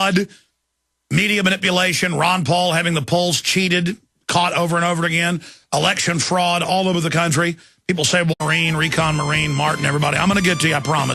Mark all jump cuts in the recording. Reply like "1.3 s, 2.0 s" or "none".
none